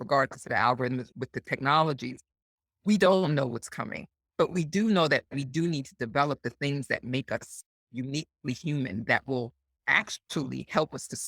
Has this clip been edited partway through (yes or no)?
yes